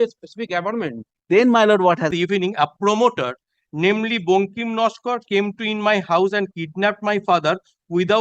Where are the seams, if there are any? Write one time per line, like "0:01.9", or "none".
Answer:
0:02.1